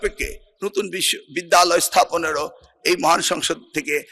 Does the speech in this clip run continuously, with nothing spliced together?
yes; 0 cuts

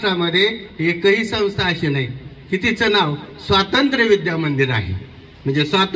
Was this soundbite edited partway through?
no; 0 cuts

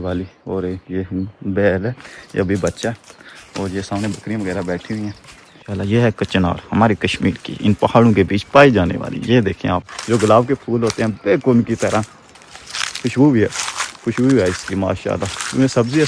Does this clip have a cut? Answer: yes; 2 cuts; at 5.7 s, 9.9 s

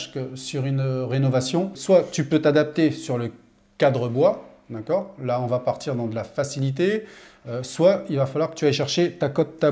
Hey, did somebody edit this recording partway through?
yes; 1 cut; at 1.8 s

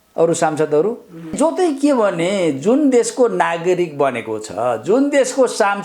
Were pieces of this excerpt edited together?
yes; 1 cut; at 1.3 s

